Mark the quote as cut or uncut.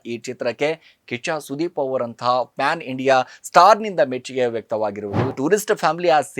cut